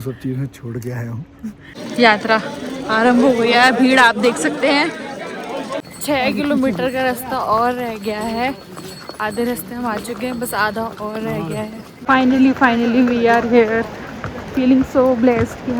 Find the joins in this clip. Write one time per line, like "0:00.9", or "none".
0:01.8
0:05.7
0:11.9